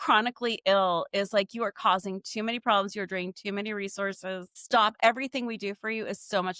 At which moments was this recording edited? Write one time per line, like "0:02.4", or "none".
0:04.9